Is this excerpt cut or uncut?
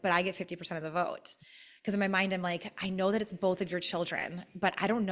uncut